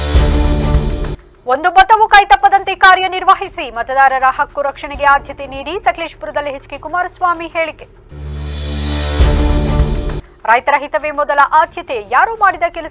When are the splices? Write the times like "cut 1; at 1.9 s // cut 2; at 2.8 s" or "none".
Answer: cut 1; at 1.2 s